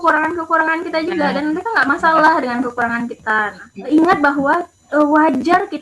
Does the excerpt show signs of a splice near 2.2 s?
no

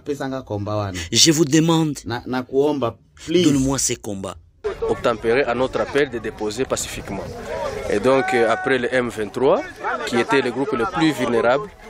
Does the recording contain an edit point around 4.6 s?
yes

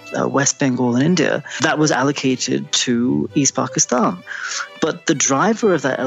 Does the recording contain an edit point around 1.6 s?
yes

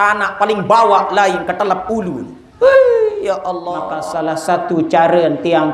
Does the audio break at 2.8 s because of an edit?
no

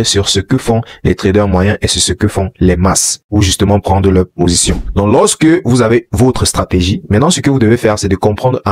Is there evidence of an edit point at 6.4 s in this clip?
no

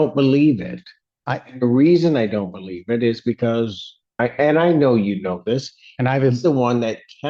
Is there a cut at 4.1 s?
yes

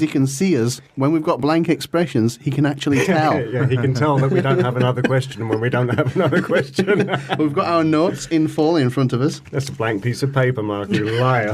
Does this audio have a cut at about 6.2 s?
no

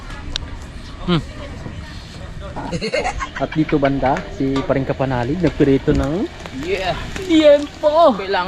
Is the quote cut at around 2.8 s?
yes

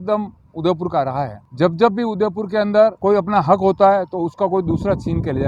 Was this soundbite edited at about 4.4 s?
no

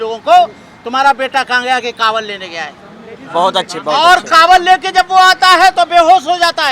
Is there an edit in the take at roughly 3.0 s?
no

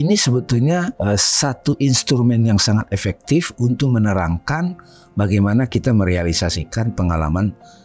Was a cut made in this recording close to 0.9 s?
yes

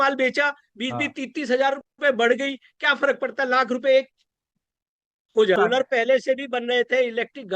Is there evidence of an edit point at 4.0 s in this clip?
no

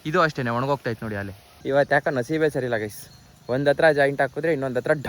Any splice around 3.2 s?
no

